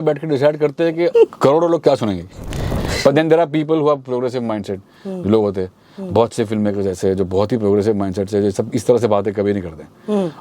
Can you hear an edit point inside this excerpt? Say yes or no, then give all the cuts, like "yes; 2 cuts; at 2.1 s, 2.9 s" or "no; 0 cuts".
yes; 2 cuts; at 1.1 s, 2.7 s